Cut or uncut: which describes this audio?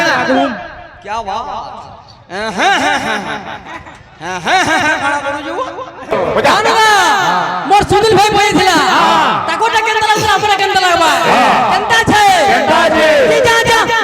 cut